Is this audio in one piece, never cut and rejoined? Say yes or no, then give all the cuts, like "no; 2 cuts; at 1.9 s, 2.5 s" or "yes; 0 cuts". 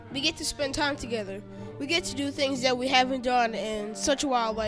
yes; 0 cuts